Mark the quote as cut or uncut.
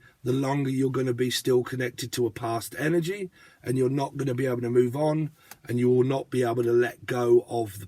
uncut